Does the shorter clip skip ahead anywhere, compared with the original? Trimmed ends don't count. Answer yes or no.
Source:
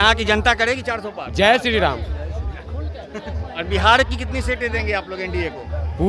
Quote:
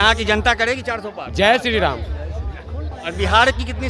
yes